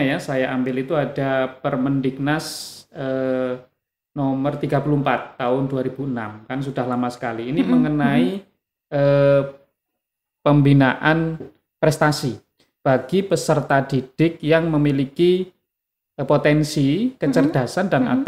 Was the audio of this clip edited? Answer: no; 0 cuts

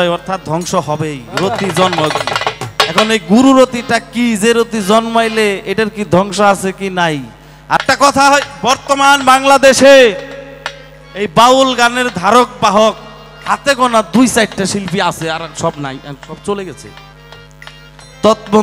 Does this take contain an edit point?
yes; 1 cut; at 7.8 s

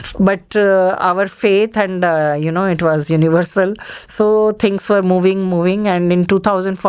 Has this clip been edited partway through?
no; 0 cuts

